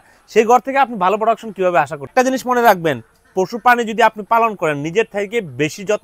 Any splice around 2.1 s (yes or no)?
yes